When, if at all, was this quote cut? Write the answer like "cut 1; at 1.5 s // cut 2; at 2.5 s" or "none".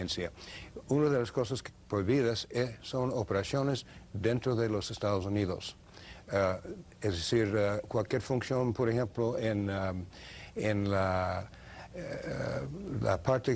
none